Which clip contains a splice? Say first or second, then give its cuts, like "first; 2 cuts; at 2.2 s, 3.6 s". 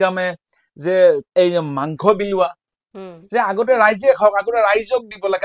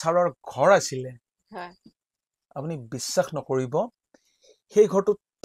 first; 1 cut; at 1.2 s